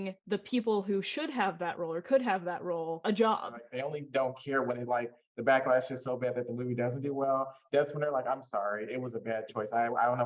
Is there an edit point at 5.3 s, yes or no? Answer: no